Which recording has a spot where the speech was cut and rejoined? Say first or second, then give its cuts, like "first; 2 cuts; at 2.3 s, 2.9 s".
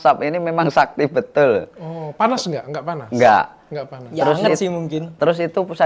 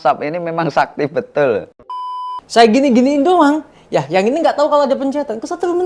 second; 1 cut; at 2.0 s